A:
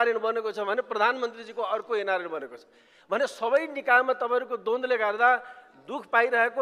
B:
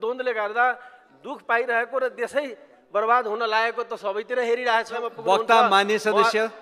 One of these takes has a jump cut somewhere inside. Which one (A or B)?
B